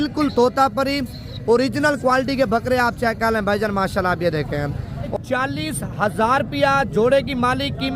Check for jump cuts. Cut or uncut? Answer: cut